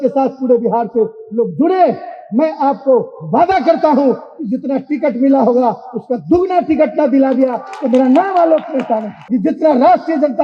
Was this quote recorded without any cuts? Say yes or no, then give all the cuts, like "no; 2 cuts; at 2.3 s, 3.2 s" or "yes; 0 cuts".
no; 1 cut; at 9.2 s